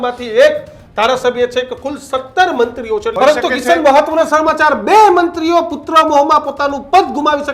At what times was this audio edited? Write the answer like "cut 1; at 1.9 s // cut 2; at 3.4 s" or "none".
cut 1; at 3.1 s